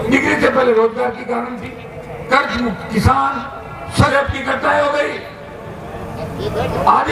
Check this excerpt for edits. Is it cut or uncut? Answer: cut